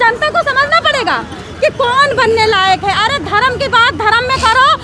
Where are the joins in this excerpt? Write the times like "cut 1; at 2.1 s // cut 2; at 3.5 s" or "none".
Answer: cut 1; at 1.3 s